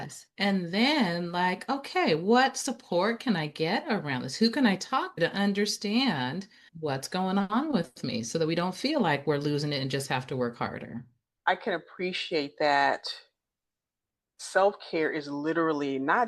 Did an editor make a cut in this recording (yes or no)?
yes